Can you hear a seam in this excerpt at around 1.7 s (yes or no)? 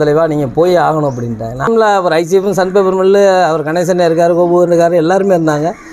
yes